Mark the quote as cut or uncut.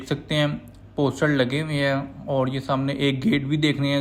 uncut